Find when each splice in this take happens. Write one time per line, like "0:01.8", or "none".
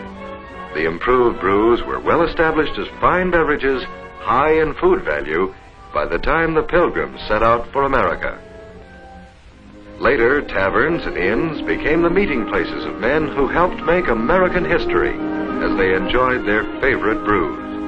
none

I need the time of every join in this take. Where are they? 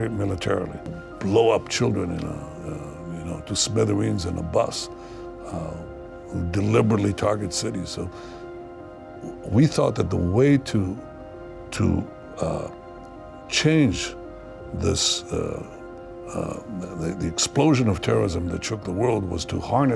0:01.0

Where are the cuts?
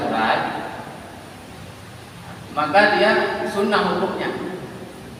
none

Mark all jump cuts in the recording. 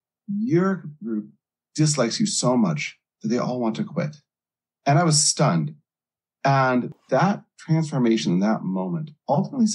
0:06.9

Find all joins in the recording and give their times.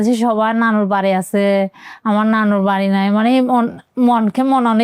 none

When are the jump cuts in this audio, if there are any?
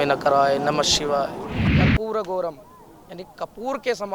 0:01.7

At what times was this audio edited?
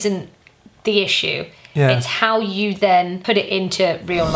0:03.2

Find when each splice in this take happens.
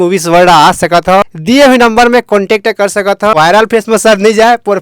0:01.2
0:03.3

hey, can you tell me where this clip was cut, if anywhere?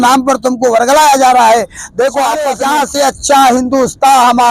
0:02.5

